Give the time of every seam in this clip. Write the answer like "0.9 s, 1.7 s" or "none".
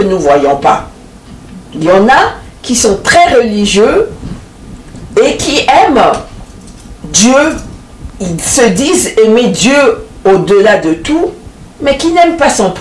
none